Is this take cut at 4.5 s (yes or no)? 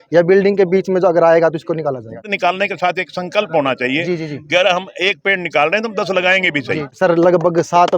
no